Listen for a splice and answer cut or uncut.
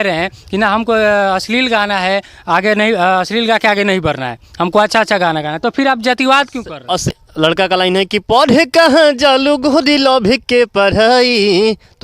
cut